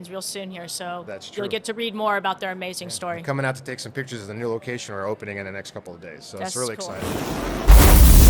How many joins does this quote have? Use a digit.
1